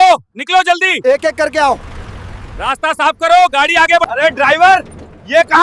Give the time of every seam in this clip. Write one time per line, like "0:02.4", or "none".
0:04.1